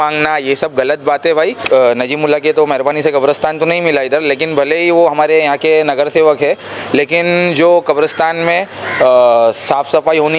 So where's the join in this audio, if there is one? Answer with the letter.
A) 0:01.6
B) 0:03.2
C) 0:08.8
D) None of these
A